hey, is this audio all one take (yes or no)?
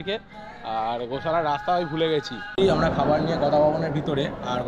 no